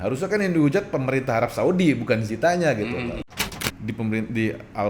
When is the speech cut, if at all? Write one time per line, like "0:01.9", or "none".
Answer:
0:03.2